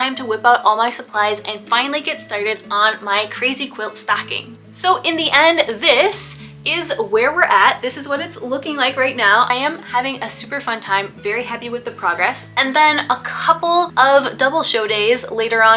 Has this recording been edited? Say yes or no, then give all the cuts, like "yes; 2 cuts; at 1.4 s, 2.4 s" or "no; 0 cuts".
yes; 4 cuts; at 4.7 s, 9.5 s, 12.5 s, 13.9 s